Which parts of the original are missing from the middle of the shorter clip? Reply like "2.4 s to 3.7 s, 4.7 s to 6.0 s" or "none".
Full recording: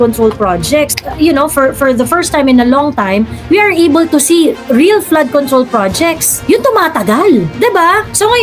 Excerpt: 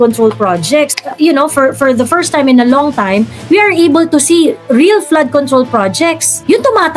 none